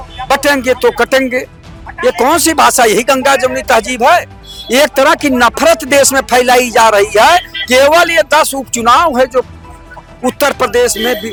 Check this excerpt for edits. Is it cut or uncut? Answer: uncut